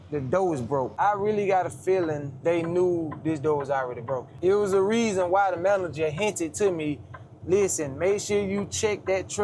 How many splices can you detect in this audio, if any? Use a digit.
3